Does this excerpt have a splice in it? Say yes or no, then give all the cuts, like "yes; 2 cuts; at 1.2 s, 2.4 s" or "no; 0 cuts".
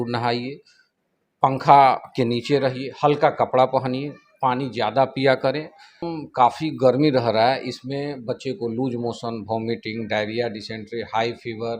yes; 1 cut; at 6.1 s